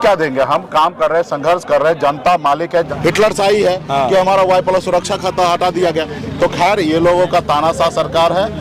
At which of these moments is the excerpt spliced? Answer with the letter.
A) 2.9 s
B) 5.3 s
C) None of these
A